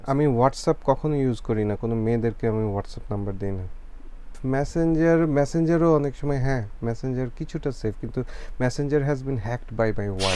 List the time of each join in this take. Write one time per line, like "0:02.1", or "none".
0:04.4

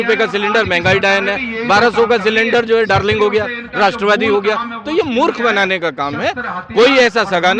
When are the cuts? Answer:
none

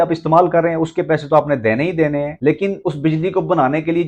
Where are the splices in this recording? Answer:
0:02.5

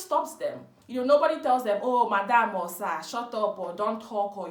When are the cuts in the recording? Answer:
none

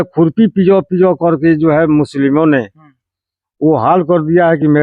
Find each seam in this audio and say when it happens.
none

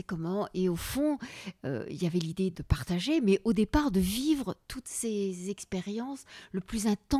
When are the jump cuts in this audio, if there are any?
0:02.5

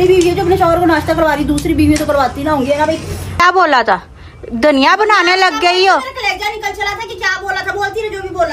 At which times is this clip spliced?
0:03.4

